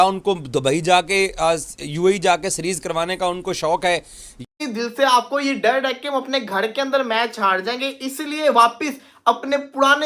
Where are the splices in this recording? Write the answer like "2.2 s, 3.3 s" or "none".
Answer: 4.4 s